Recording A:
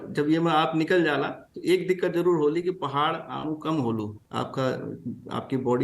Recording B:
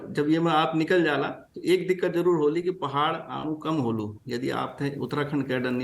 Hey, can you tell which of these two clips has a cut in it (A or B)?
A